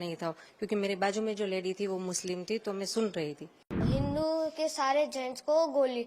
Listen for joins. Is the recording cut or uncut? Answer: cut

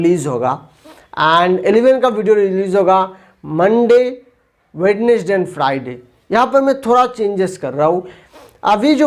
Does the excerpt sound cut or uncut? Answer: uncut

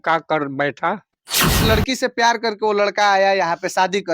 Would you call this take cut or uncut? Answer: cut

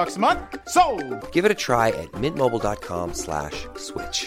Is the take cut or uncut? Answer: uncut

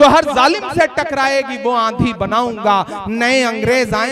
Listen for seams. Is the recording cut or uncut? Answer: uncut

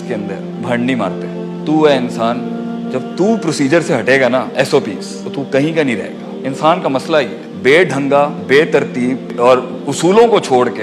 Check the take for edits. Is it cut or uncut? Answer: uncut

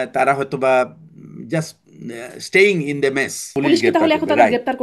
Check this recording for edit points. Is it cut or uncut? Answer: cut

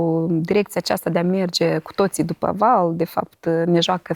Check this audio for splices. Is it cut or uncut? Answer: uncut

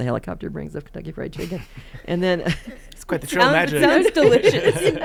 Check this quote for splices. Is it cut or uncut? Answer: uncut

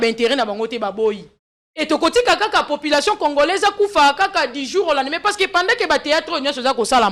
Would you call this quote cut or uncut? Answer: uncut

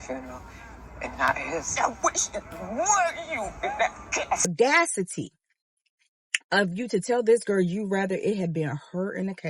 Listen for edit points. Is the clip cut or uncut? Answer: cut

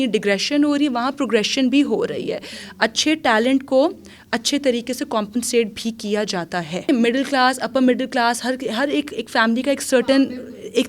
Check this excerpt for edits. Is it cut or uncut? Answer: cut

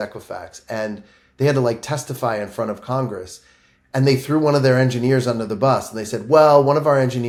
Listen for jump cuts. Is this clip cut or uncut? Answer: uncut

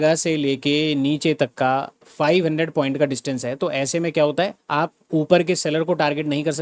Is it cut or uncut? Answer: uncut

